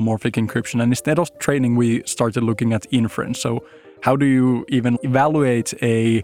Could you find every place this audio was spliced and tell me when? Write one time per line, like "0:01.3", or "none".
0:05.0